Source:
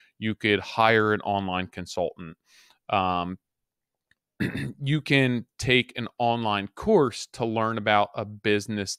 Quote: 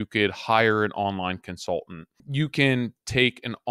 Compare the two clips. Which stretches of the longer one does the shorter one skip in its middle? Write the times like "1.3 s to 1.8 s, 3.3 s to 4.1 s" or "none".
2.5 s to 4.7 s